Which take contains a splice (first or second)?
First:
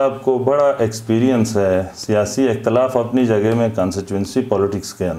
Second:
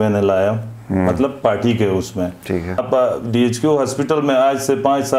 second